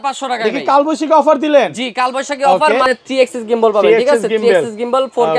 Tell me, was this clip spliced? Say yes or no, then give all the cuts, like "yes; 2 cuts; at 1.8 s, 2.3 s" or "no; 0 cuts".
yes; 1 cut; at 2.9 s